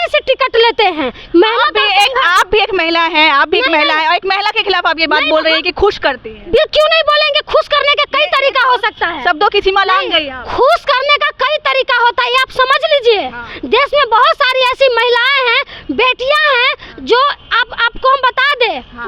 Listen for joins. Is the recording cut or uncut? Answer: uncut